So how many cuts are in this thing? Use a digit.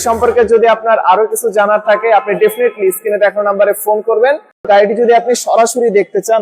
1